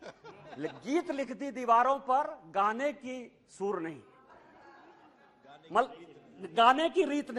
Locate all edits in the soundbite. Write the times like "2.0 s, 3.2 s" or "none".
none